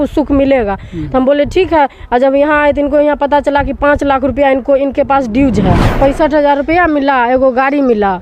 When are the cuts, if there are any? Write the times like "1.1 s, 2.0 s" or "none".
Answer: 5.8 s